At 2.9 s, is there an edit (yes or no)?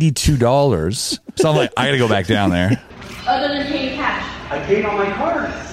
yes